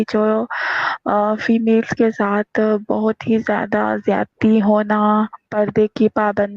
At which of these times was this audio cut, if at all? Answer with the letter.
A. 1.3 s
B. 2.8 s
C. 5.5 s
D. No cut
C